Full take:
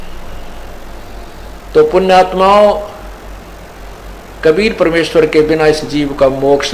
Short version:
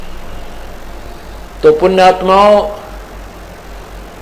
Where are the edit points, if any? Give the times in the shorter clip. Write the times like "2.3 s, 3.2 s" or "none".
1.1 s